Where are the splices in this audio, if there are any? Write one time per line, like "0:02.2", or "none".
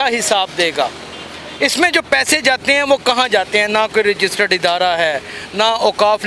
none